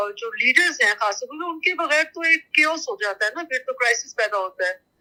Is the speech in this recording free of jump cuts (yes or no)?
yes